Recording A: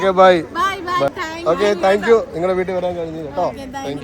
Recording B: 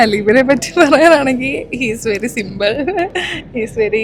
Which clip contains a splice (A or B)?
A